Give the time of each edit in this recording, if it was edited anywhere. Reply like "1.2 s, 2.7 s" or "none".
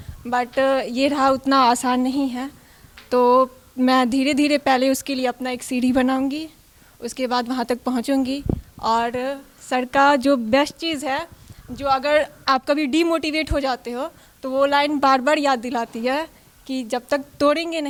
none